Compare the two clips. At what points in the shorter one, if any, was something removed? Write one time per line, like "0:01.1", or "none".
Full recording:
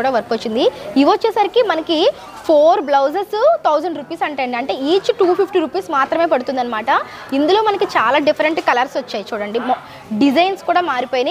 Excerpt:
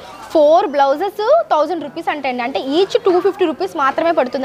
none